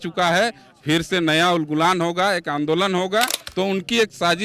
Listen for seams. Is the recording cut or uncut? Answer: cut